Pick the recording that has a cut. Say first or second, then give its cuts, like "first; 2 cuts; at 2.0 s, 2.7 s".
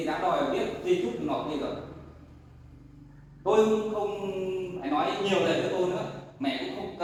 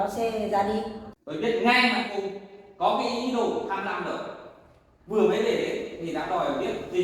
second; 1 cut; at 1.0 s